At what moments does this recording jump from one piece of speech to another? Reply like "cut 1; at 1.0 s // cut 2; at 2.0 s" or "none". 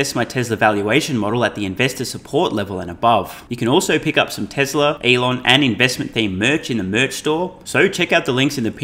cut 1; at 3.4 s // cut 2; at 5.0 s // cut 3; at 7.6 s